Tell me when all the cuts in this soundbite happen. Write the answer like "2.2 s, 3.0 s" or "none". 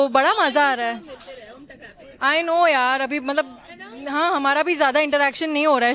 none